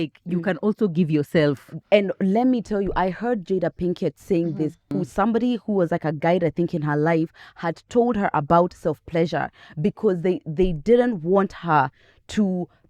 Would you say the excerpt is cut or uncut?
cut